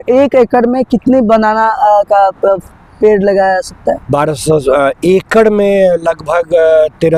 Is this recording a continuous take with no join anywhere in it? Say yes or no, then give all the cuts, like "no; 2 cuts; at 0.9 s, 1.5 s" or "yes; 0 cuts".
yes; 0 cuts